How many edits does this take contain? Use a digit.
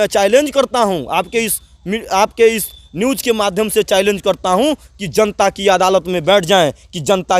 0